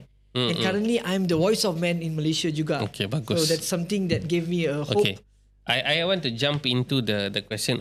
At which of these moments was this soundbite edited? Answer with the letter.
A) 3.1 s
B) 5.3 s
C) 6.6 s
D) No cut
D